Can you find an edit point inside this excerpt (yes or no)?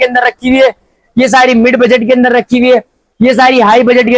no